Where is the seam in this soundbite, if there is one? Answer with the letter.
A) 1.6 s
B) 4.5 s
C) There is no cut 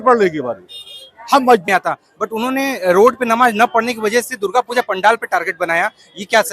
A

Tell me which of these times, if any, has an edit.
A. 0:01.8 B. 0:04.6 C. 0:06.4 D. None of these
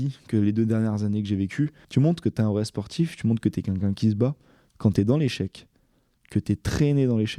A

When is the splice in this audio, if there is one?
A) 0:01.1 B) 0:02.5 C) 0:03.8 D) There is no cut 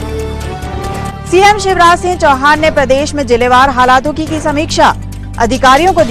A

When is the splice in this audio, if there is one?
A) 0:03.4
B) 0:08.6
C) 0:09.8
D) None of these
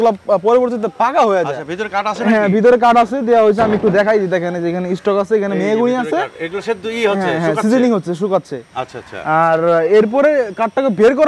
D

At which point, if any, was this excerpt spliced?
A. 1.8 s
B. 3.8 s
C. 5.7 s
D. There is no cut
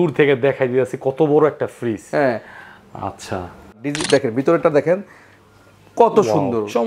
B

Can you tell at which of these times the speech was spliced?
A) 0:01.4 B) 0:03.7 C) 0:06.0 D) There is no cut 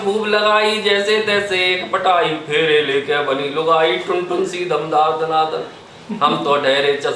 D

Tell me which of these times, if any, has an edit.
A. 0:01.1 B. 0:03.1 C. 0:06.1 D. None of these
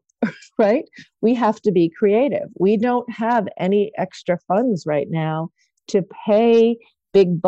A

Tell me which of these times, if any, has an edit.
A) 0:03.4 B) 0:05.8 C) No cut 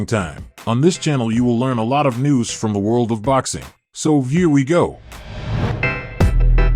B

